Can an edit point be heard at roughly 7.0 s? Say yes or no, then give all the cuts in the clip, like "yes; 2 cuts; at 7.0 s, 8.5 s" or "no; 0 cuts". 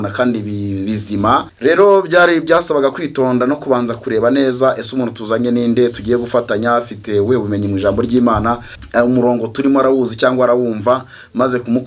no; 2 cuts; at 1.5 s, 8.7 s